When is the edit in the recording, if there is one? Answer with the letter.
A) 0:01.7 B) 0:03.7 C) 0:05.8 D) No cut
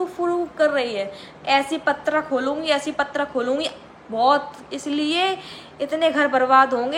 D